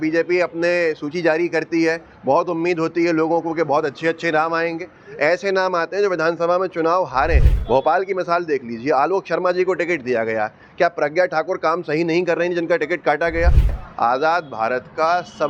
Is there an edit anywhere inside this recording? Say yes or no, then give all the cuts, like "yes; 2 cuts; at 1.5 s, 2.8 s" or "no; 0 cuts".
yes; 2 cuts; at 7.5 s, 13.7 s